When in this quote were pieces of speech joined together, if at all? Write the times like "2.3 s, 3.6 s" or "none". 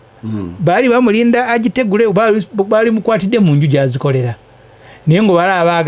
none